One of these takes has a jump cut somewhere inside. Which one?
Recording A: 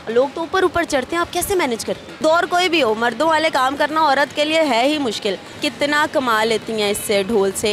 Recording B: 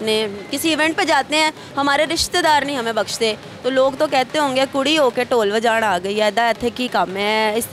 A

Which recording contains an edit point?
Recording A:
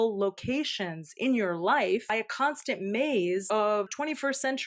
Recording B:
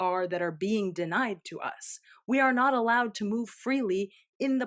A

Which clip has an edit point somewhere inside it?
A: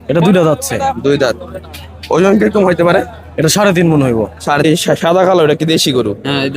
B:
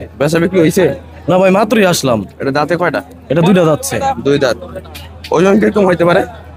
A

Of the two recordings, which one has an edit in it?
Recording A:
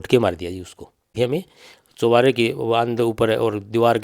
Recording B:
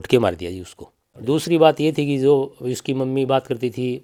A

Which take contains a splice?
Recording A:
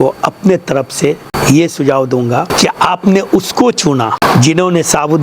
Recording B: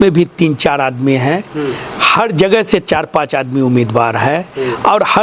A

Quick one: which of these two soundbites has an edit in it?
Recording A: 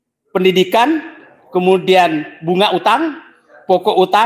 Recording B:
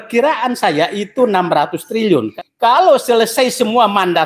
B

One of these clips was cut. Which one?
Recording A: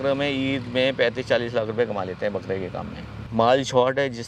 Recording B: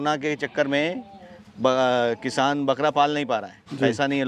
A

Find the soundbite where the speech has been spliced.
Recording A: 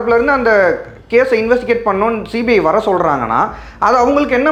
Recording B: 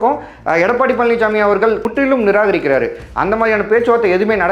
B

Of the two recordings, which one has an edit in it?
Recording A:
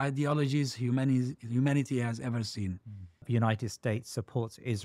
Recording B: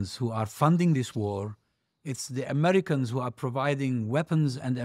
A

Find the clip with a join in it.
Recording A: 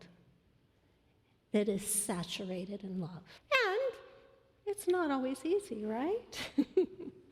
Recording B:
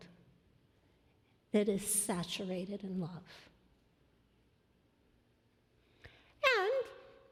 A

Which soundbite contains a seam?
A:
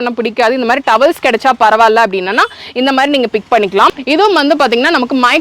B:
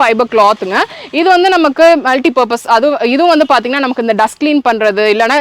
A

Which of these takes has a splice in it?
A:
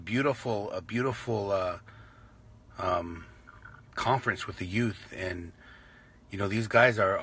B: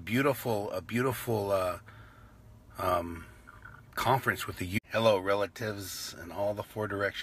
A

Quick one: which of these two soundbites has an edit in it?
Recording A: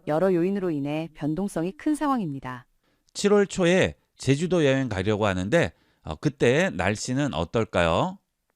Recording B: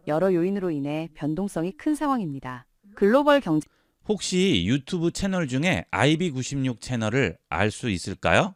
A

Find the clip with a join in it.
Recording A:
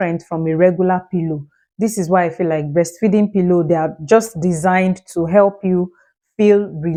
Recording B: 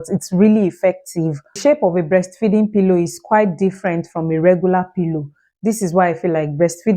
B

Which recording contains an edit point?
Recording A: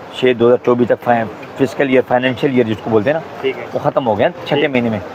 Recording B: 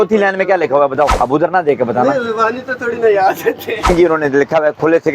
B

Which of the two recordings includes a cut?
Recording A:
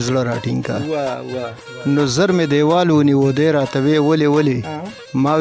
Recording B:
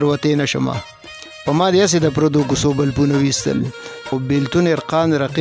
B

